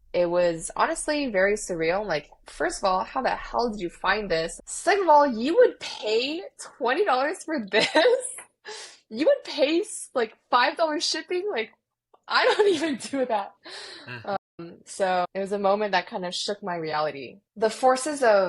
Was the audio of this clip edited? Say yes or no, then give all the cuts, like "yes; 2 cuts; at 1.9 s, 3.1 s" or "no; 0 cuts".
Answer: yes; 2 cuts; at 4.6 s, 15.3 s